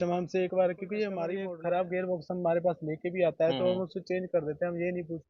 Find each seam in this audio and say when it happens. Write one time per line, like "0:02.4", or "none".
0:01.4